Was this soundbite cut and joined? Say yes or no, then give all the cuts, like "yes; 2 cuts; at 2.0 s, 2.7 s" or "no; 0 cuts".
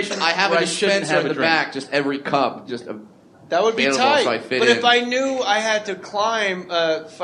no; 0 cuts